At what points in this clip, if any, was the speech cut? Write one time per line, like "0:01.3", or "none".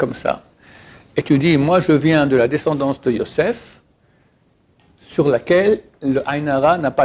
none